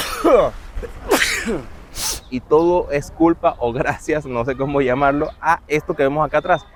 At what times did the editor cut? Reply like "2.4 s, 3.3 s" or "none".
none